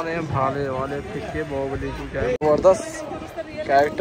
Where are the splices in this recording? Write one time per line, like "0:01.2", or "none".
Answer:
0:02.4